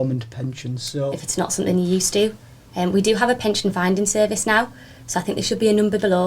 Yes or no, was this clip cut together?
yes